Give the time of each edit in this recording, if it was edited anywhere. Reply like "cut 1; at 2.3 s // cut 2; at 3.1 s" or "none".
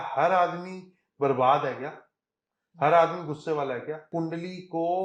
cut 1; at 4.1 s